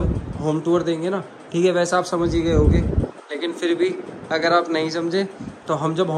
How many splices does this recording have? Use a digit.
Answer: 0